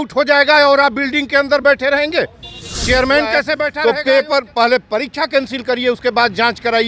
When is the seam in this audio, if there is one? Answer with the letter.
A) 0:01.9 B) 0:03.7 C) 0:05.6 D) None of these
B